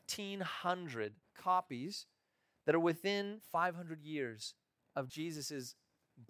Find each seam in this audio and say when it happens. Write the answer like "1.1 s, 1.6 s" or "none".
1.3 s, 3.4 s, 5.1 s